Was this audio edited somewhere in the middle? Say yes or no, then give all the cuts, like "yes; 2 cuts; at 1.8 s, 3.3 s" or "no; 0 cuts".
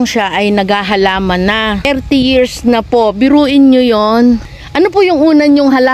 yes; 2 cuts; at 1.9 s, 4.6 s